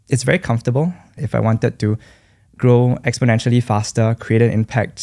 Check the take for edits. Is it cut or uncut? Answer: cut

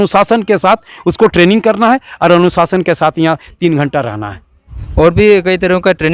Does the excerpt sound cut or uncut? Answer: uncut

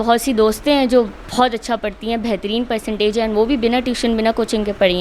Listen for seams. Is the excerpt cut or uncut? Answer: uncut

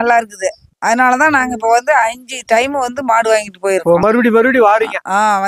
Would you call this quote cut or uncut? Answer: uncut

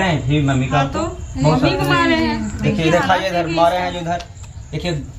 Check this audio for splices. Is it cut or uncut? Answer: uncut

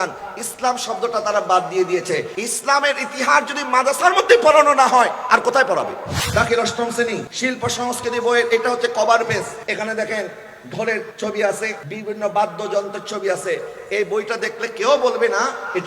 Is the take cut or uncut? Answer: cut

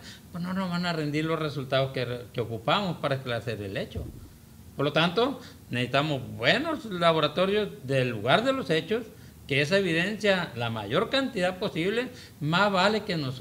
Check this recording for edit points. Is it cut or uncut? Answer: uncut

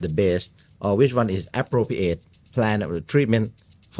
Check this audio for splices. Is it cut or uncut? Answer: uncut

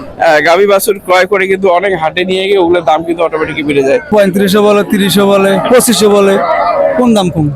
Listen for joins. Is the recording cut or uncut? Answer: cut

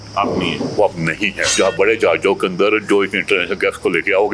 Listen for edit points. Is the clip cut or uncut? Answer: cut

